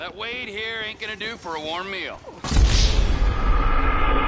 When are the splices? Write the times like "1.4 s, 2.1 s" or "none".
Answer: 2.3 s

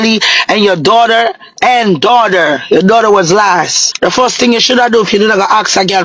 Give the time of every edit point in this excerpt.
3.8 s

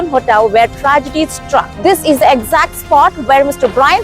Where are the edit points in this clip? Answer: 1.7 s

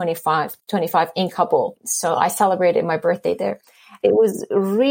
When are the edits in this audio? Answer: 1.8 s, 4.0 s

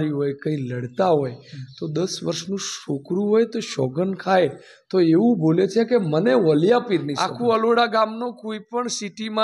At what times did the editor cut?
7.2 s

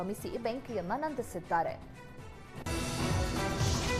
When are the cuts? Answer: none

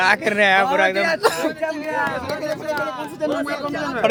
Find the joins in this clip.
none

